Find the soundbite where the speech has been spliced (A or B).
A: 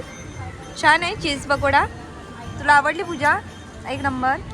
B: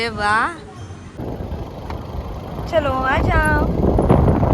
B